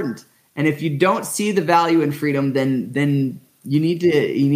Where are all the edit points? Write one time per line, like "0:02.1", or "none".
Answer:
none